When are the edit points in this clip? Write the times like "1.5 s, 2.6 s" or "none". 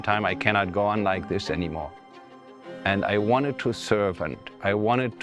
none